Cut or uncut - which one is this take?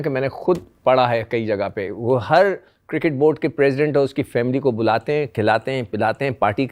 uncut